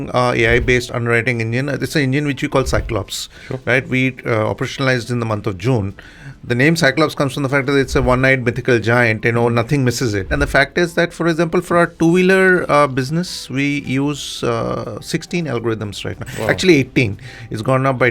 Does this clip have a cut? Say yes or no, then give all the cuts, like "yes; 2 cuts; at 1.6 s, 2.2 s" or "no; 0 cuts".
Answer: yes; 1 cut; at 10.3 s